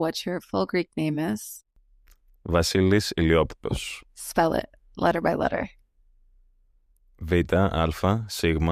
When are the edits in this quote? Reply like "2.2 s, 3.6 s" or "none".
none